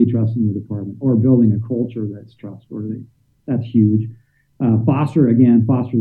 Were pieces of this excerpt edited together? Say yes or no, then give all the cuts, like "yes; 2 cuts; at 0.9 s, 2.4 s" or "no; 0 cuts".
no; 0 cuts